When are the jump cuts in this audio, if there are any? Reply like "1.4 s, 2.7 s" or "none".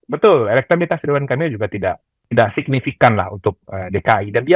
2.1 s